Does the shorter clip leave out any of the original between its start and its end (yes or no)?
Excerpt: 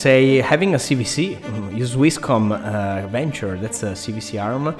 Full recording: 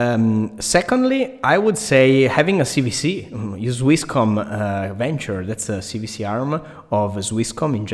no